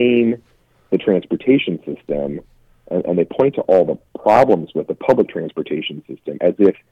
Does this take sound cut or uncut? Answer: uncut